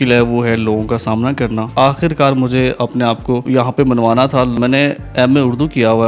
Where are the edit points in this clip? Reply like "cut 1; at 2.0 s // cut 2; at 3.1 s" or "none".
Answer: cut 1; at 1.7 s // cut 2; at 3.4 s // cut 3; at 4.6 s